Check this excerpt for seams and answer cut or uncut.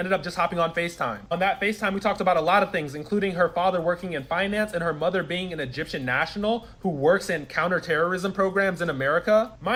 uncut